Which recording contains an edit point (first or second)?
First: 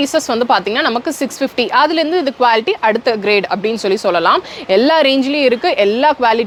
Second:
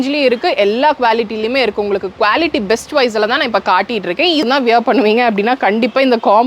second